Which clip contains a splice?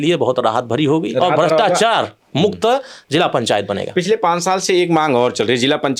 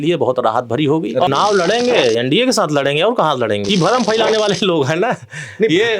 second; 2 cuts; at 1.3 s, 3.6 s

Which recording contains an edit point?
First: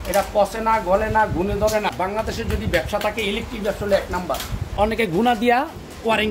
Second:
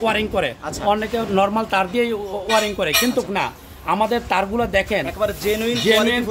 first; 2 cuts; at 1.9 s, 4.7 s

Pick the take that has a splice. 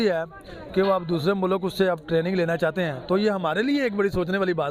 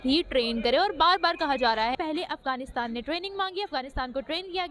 second; 1 cut; at 1.9 s

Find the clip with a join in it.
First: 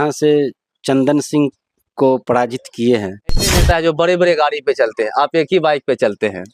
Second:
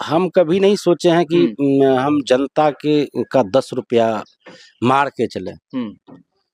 first; 1 cut; at 3.6 s

